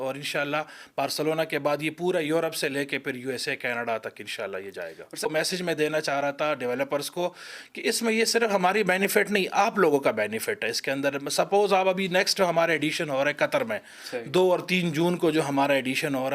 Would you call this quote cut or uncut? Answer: cut